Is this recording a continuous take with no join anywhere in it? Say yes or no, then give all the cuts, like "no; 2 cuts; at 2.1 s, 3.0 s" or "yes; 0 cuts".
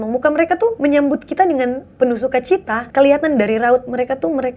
no; 2 cuts; at 0.8 s, 2.8 s